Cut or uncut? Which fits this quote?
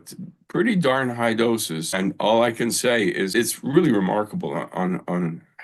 cut